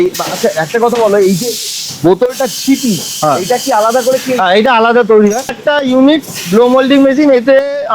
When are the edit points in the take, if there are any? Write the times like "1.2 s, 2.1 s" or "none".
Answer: 5.6 s